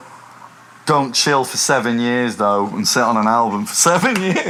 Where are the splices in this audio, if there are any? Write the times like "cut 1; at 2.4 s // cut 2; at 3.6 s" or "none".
none